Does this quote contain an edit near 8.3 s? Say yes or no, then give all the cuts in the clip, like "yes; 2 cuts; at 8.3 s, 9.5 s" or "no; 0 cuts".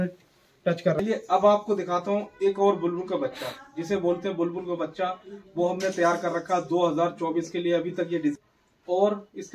yes; 2 cuts; at 1.0 s, 8.3 s